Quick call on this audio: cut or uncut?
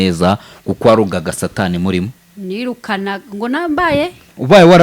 uncut